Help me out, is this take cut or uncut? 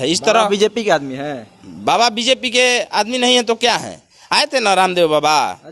uncut